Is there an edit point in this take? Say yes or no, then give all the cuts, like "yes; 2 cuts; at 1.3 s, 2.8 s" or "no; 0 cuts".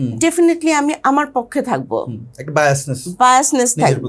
no; 0 cuts